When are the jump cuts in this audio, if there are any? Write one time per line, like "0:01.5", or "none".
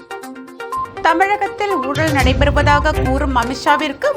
0:00.9